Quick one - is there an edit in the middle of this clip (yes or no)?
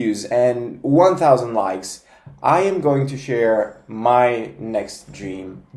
no